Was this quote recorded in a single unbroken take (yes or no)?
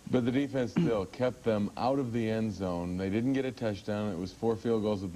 no